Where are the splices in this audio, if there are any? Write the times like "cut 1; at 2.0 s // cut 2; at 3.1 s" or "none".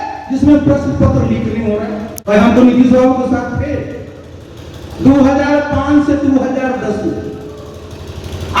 cut 1; at 2.1 s